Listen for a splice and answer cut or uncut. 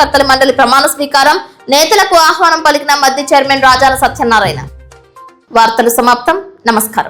uncut